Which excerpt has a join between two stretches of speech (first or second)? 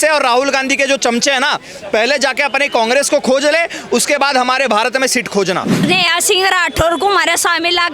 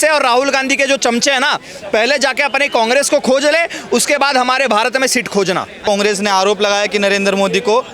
first